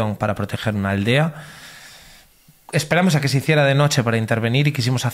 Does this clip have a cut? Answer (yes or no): no